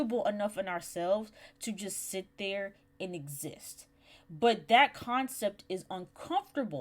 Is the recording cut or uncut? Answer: uncut